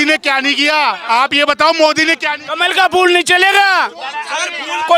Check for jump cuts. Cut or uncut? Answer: uncut